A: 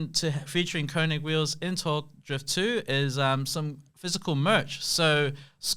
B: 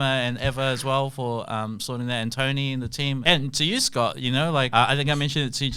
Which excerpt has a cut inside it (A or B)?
B